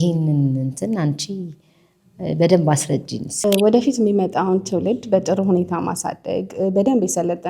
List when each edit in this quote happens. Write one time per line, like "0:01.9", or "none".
0:03.5